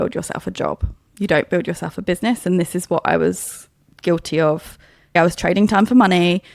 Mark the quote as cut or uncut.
cut